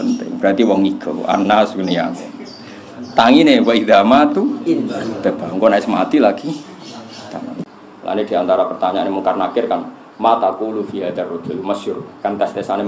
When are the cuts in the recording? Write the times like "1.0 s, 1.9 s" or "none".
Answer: 7.7 s